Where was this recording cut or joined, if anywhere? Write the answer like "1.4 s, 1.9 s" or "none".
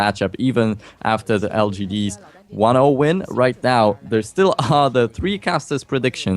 1.6 s